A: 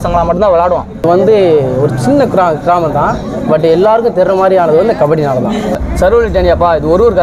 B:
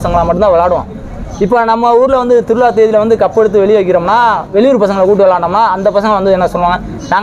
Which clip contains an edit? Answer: A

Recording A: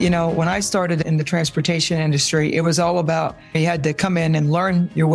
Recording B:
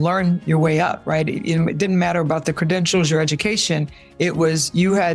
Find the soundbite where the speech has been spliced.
A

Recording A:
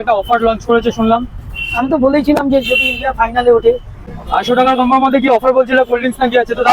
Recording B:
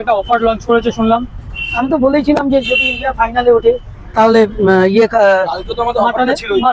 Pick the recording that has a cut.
A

